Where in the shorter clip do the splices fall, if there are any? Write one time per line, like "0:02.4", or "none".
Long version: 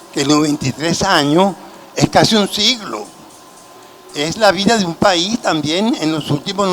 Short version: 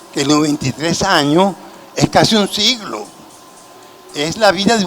none